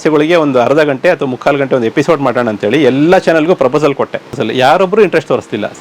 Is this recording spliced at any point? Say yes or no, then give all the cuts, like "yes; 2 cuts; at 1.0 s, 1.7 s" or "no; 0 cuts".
yes; 1 cut; at 4.4 s